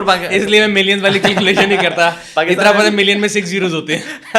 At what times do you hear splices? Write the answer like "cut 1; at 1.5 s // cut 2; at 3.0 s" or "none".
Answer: none